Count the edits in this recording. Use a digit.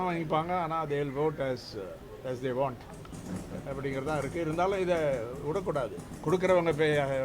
1